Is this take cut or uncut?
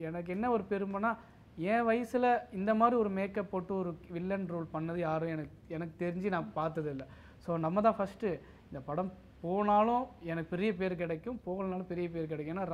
uncut